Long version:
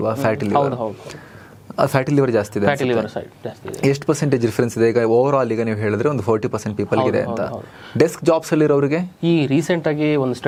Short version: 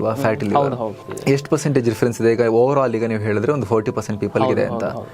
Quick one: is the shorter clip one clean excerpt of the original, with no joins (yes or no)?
no